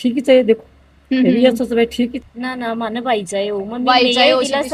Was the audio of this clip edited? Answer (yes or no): yes